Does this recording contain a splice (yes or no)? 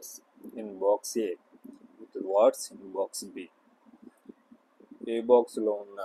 yes